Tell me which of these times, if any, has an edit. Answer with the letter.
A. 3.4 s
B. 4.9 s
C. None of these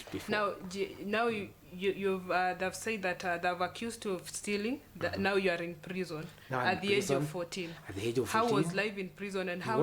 C